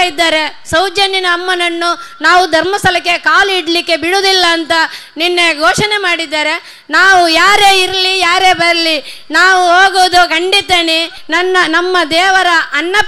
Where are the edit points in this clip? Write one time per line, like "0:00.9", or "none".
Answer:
0:11.2